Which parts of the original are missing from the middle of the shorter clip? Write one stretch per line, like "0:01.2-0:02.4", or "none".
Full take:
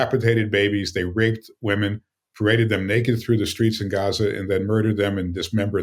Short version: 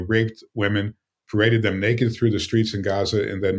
none

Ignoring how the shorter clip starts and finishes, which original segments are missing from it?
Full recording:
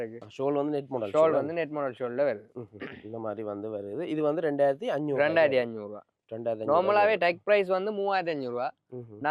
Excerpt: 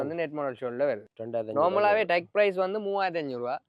0:02.5-0:06.3

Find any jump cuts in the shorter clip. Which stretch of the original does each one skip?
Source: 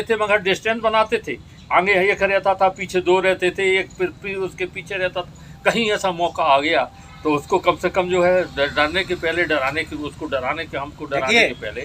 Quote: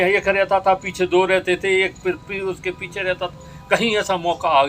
none

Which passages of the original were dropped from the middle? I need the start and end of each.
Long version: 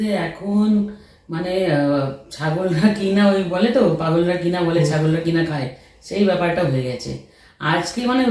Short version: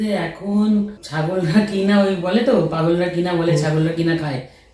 0:01.0-0:02.3

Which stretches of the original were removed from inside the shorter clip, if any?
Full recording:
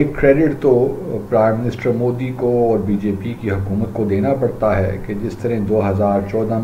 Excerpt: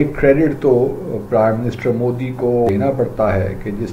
0:02.7-0:04.1

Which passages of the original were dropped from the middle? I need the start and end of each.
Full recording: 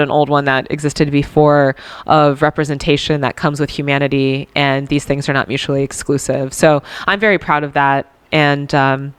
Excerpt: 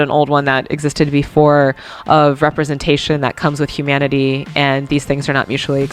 none

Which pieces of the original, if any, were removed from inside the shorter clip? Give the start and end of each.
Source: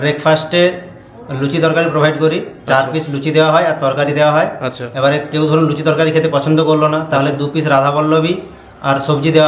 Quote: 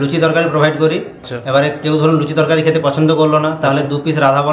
0:02.6-0:04.6

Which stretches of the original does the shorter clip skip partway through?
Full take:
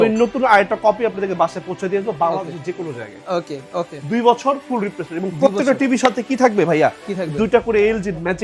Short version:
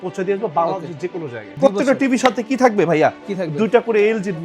0:03.1-0:05.3

